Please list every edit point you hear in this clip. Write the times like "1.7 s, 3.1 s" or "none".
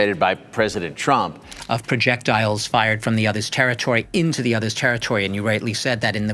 1.5 s